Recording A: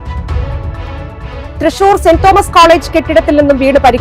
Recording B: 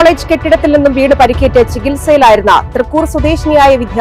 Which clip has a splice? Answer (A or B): A